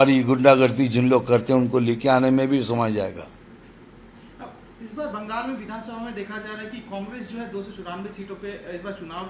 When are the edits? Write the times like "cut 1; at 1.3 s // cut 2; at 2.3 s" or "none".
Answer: none